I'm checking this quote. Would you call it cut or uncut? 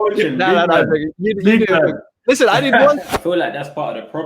cut